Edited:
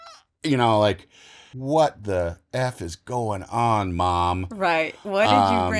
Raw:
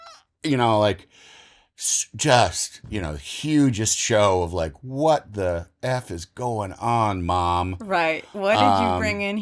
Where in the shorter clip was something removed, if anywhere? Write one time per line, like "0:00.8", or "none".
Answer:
0:01.5